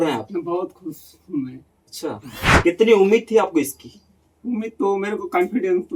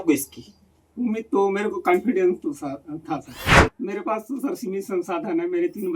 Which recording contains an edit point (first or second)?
second